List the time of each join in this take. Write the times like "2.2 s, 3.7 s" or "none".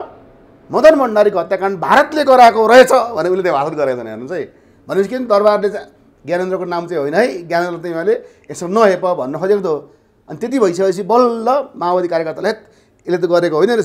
none

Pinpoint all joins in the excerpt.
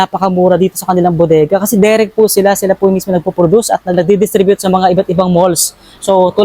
4.0 s

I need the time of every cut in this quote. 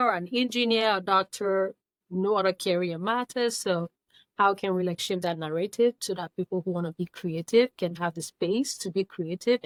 none

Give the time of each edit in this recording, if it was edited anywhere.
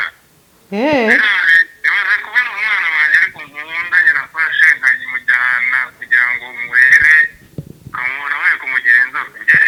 none

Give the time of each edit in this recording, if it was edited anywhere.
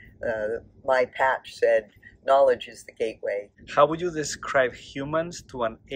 3.6 s

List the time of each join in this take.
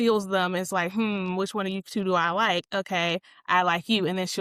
none

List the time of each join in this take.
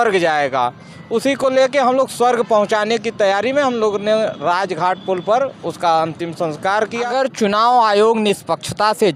7.1 s

